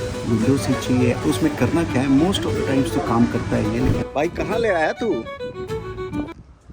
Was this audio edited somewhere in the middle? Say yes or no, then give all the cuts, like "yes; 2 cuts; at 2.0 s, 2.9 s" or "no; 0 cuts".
yes; 2 cuts; at 1.2 s, 4.0 s